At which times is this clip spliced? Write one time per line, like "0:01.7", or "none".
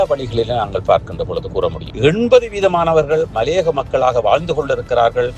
0:01.8